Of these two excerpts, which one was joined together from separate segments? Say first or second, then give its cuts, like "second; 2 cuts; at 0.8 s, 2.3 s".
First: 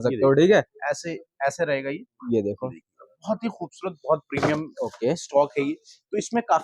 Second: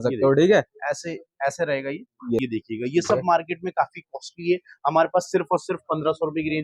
second; 1 cut; at 2.4 s